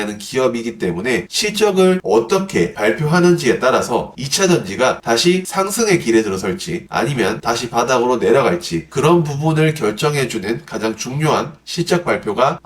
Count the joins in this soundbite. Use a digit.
2